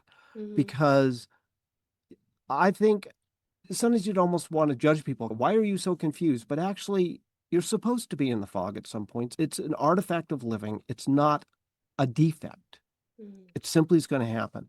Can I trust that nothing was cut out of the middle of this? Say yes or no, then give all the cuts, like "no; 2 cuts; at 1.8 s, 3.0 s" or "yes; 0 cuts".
no; 2 cuts; at 5.3 s, 9.3 s